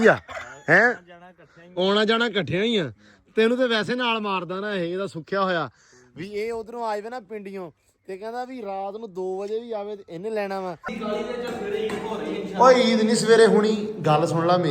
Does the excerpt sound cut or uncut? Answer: cut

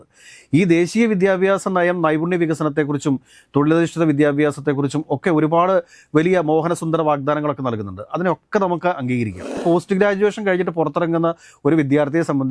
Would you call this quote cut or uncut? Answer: cut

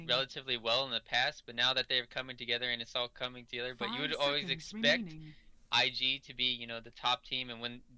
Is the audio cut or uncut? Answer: cut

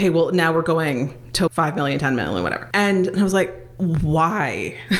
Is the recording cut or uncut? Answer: cut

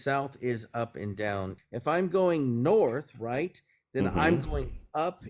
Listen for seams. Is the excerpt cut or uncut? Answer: cut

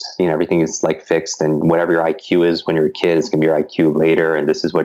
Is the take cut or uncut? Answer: uncut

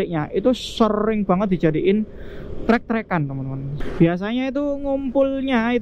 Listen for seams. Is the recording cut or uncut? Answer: cut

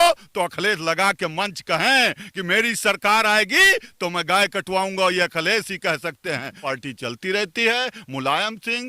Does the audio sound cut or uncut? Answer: cut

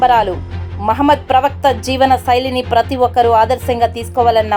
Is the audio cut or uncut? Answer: uncut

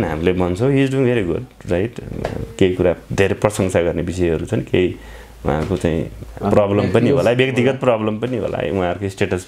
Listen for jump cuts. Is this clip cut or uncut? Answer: uncut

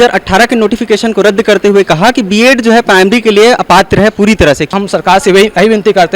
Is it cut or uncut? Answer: cut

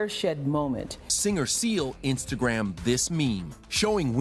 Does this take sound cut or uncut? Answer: cut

